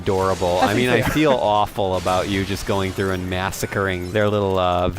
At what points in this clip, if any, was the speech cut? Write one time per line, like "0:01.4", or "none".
0:04.0